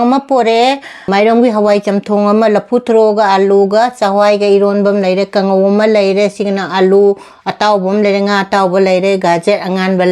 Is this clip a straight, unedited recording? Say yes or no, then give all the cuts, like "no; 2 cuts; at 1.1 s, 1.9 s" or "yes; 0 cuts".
no; 1 cut; at 0.9 s